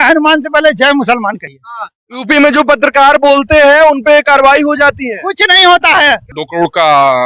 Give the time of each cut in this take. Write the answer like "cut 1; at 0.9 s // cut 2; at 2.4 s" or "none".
cut 1; at 6.3 s